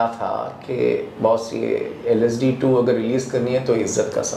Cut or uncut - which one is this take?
uncut